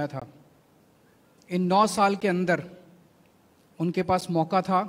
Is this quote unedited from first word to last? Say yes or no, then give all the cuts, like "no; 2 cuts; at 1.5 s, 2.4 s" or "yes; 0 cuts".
yes; 0 cuts